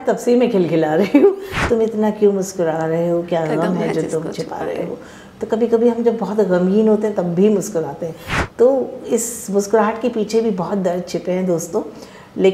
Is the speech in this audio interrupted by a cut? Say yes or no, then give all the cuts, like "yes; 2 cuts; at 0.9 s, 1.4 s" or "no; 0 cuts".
yes; 1 cut; at 1.5 s